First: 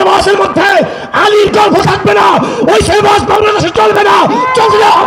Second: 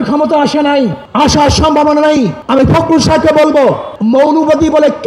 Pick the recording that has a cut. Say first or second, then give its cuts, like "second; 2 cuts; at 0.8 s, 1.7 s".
second; 3 cuts; at 1.0 s, 2.4 s, 3.9 s